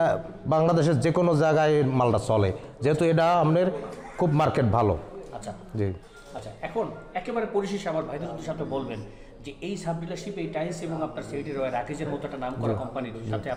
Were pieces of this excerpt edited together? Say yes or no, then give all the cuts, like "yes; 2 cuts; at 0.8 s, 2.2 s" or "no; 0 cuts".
no; 0 cuts